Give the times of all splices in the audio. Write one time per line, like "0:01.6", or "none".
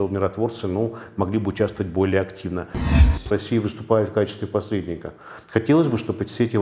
0:03.1